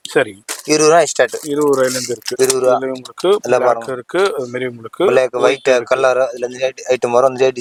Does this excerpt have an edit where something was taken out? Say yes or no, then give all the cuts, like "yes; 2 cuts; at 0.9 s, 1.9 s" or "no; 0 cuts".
no; 0 cuts